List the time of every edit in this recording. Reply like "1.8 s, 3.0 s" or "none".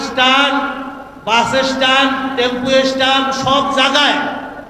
none